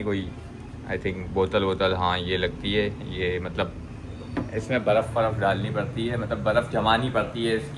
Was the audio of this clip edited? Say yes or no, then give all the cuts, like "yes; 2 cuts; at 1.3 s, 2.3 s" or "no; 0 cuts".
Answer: no; 0 cuts